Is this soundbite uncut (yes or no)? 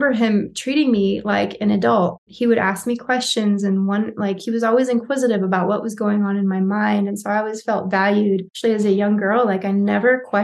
no